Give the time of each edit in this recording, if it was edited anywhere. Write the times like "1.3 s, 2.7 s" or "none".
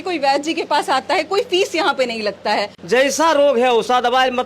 2.8 s